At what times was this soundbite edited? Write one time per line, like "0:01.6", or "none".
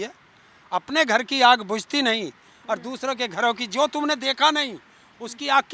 none